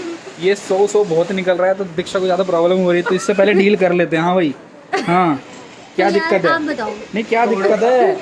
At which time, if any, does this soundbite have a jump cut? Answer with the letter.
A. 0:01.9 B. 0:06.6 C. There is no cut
C